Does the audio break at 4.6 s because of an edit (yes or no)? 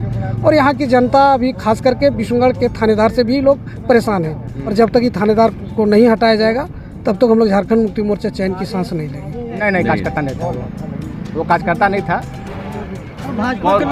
yes